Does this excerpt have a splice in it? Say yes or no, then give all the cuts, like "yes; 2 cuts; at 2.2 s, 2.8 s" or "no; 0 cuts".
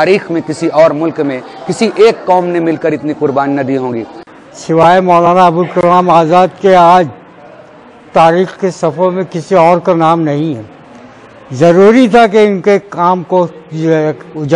yes; 1 cut; at 4.2 s